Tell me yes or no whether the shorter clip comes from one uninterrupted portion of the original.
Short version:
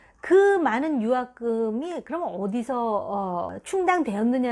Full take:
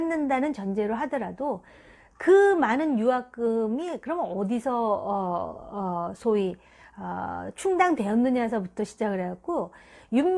no